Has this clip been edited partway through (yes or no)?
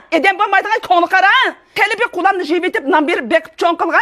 yes